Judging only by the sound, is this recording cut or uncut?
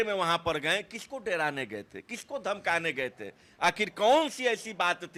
uncut